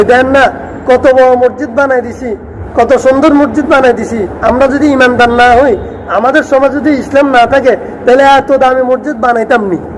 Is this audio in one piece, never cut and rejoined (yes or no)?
no